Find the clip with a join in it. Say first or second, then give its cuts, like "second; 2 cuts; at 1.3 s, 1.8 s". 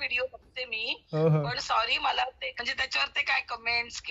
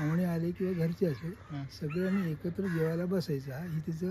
first; 1 cut; at 2.5 s